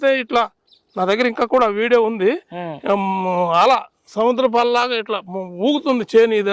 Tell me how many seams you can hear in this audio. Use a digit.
0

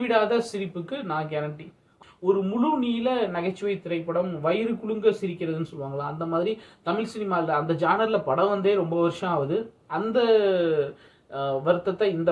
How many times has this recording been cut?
1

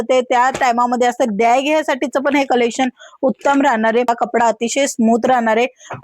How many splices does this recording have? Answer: 1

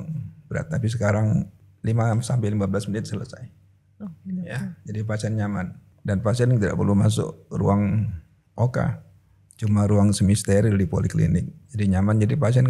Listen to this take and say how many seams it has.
3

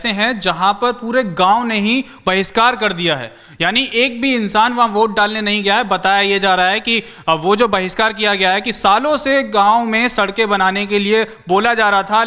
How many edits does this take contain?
0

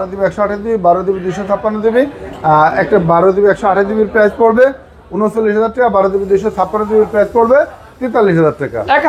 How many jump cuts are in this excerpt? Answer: 0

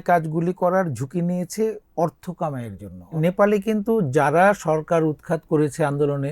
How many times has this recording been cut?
1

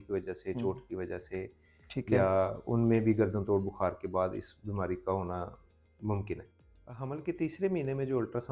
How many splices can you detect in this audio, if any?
1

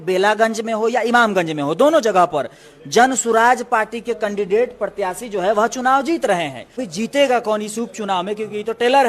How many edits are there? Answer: 1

